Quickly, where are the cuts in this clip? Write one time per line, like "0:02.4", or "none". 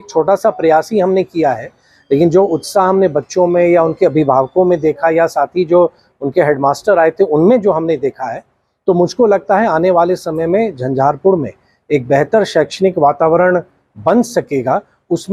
none